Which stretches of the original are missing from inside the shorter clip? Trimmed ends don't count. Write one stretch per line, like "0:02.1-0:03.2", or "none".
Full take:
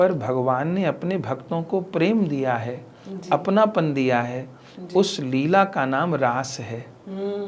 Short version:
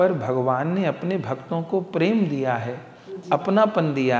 none

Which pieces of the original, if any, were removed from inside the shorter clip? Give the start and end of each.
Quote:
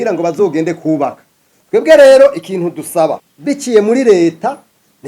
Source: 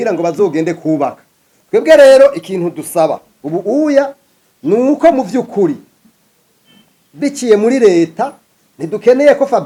0:03.3-0:07.0

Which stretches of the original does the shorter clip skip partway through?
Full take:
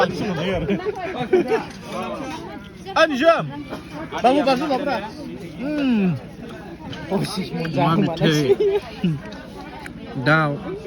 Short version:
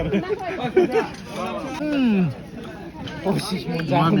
0:02.3-0:05.6

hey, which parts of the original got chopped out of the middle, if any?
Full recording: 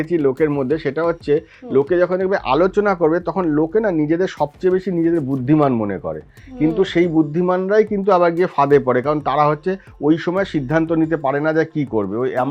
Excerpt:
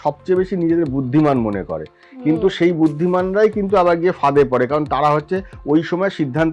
none

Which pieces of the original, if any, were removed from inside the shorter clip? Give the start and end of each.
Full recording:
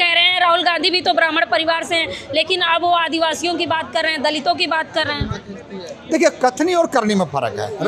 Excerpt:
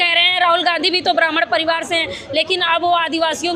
none

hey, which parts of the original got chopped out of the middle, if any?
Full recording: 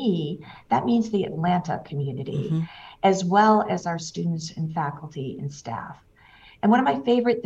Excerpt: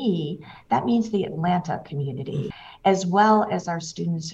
0:02.5-0:02.7

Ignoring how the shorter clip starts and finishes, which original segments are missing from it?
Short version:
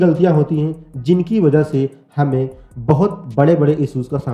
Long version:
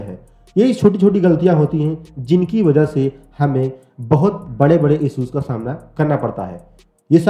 none

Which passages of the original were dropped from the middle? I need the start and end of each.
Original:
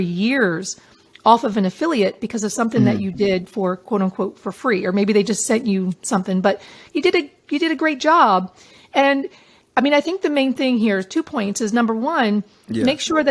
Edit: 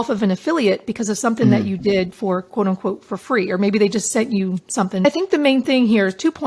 0:06.4-0:10.0

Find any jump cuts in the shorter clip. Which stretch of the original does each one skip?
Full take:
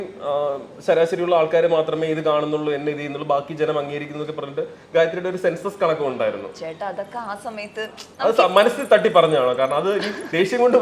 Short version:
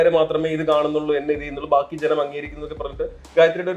none

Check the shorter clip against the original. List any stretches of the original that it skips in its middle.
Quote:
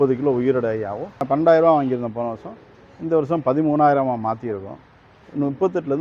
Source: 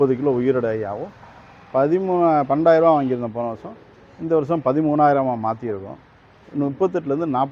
0:01.2-0:02.4

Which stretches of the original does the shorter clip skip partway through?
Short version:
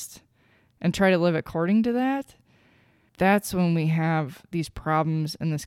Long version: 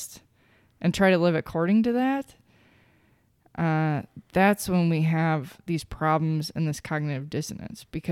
0:03.0-0:04.1

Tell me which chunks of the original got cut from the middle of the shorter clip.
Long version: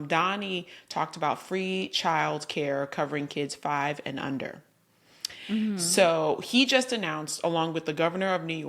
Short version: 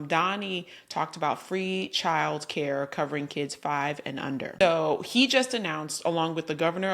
0:04.6-0:06.0

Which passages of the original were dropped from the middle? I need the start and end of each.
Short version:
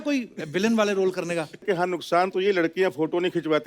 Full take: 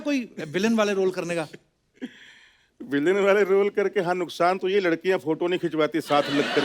0:01.6-0:03.9

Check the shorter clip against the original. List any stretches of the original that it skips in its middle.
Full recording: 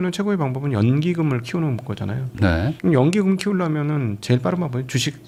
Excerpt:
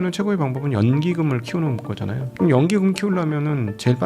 0:02.3-0:02.7

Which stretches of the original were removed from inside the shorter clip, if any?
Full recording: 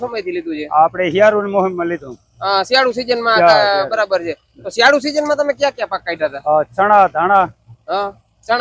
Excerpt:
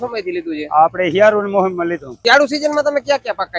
0:02.1-0:04.6

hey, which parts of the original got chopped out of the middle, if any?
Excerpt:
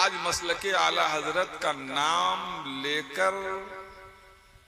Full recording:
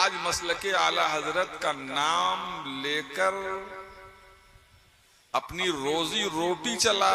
none

